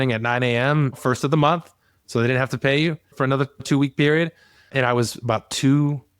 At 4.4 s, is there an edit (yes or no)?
no